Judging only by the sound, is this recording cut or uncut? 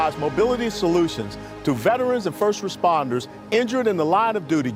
uncut